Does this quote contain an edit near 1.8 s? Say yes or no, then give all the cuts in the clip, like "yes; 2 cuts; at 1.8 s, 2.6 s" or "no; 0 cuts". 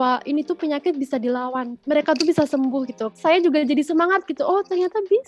yes; 2 cuts; at 1.8 s, 3.1 s